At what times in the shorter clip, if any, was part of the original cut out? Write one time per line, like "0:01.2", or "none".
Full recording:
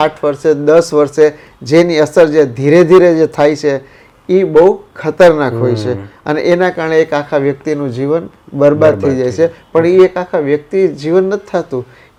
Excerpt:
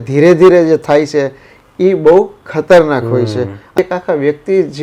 0:03.8